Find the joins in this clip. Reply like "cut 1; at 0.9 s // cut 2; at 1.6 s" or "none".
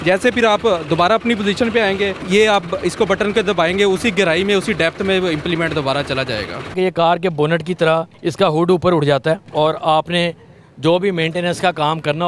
cut 1; at 2.2 s // cut 2; at 6.7 s // cut 3; at 8.2 s // cut 4; at 9.4 s